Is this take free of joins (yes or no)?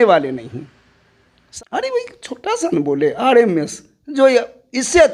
yes